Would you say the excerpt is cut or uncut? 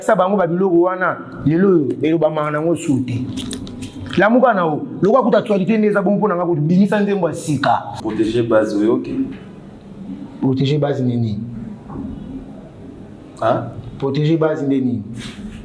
cut